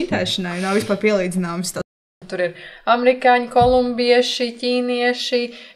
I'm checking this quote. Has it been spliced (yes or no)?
yes